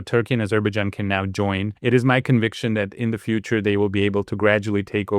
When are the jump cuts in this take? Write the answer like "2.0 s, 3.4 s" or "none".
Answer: 1.7 s